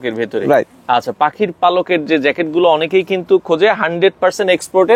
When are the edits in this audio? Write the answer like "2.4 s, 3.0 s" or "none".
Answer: none